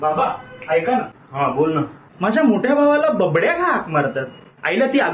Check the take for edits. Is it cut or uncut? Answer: uncut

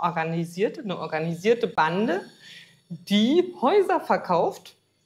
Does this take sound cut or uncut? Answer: uncut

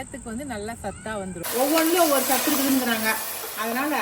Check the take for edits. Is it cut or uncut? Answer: cut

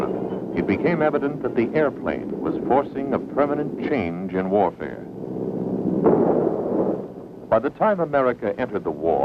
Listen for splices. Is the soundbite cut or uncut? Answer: cut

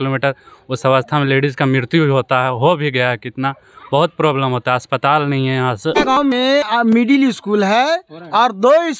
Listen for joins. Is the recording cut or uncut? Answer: cut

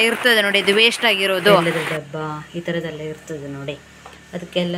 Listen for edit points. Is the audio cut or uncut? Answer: cut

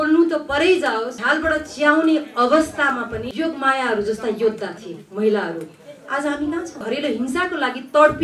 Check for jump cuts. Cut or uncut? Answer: cut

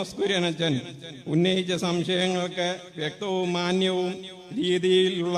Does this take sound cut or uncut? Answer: uncut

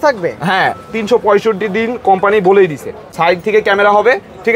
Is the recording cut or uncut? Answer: cut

